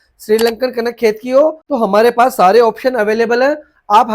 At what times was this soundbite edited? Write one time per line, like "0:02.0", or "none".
0:01.6